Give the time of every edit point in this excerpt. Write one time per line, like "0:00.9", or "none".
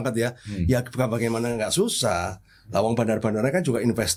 none